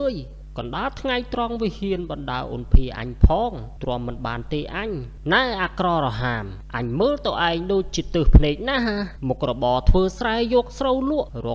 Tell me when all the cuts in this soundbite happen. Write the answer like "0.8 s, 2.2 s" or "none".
5.1 s